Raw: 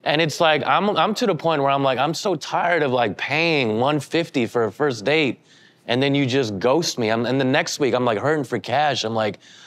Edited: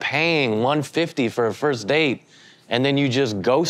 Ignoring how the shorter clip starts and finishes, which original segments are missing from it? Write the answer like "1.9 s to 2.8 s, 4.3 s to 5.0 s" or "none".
none